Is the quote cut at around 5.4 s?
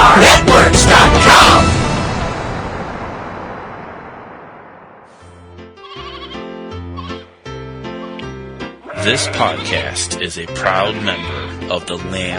yes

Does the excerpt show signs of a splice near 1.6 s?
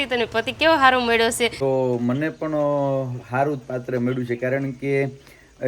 yes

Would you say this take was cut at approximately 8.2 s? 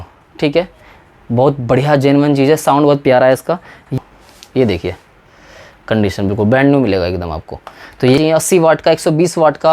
yes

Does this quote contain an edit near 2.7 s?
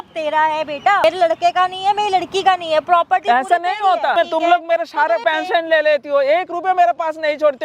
no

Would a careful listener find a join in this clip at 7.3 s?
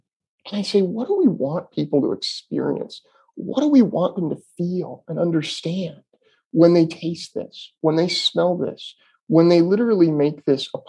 no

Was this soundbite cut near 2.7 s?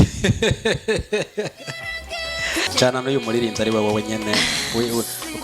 yes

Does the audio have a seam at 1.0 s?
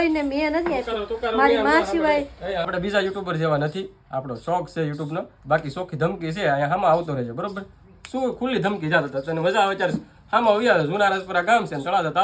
no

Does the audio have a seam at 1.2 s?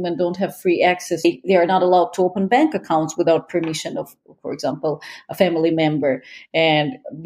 yes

